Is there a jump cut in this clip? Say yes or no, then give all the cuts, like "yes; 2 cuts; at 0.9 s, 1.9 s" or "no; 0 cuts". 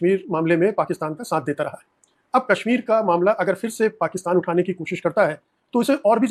no; 0 cuts